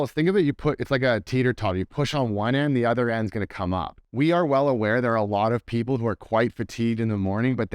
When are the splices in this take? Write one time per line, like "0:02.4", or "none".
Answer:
0:04.1